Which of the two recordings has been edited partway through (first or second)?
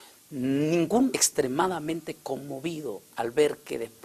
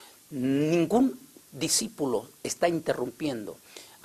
second